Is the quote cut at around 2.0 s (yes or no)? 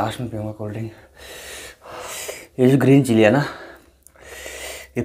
yes